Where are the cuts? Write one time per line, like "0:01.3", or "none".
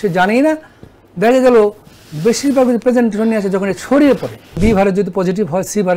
0:04.6